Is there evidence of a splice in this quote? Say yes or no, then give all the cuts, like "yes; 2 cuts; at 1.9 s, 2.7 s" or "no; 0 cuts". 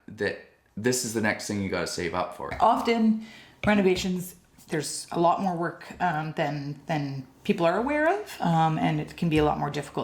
yes; 1 cut; at 2.5 s